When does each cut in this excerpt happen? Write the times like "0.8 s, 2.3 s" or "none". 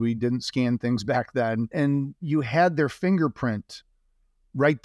1.7 s